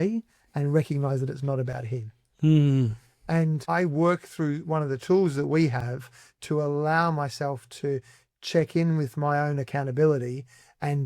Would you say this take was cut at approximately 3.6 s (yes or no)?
yes